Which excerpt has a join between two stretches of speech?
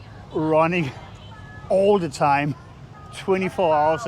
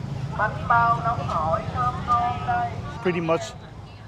second; 1 cut; at 2.9 s

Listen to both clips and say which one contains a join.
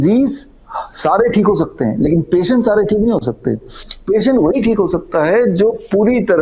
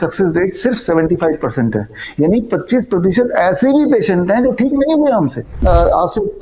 second; 1 cut; at 5.5 s

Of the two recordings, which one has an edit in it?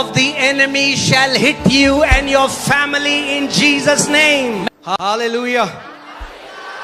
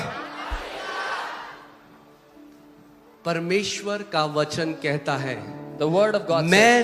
first; 1 cut; at 4.6 s

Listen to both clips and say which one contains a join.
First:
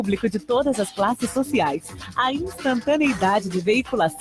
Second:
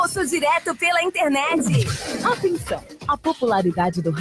second; 1 cut; at 1.9 s

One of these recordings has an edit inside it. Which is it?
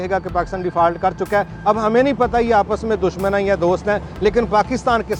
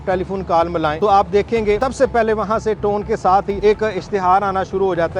second; 3 cuts; at 0.9 s, 1.8 s, 3.5 s

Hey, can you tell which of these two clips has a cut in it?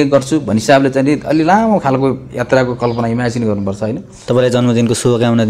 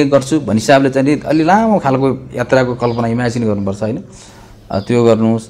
first; 1 cut; at 4.1 s

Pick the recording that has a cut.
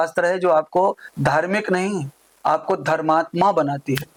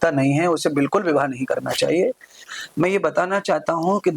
second; 1 cut; at 2.5 s

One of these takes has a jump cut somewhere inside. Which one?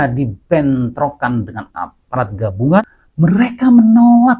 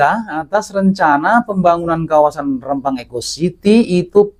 first; 1 cut; at 2.8 s

